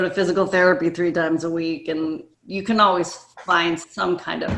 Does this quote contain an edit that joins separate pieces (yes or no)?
yes